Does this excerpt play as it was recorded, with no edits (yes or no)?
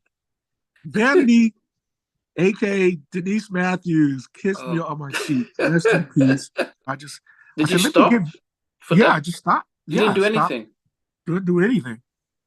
no